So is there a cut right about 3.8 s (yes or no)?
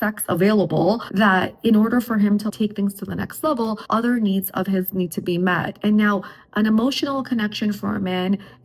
yes